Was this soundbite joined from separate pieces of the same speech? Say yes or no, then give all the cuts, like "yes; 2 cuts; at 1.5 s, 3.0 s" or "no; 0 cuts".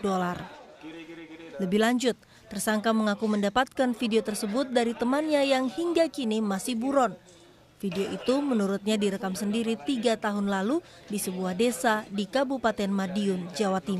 no; 0 cuts